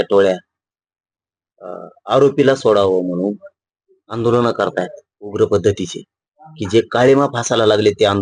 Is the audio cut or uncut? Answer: uncut